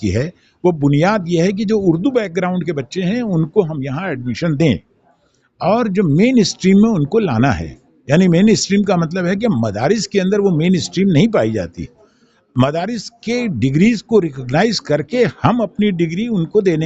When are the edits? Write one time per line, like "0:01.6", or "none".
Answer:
none